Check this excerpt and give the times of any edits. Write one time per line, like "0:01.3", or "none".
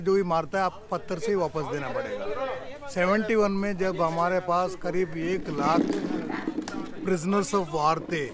none